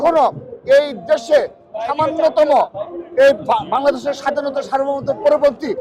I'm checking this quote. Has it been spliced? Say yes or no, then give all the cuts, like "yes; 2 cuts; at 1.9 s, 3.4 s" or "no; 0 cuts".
no; 0 cuts